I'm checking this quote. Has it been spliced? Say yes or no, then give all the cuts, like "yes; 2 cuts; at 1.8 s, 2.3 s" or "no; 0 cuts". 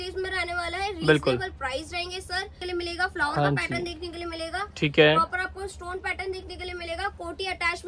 yes; 1 cut; at 2.6 s